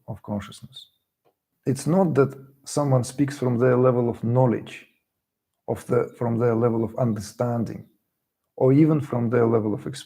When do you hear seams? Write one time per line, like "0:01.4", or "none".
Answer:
0:01.5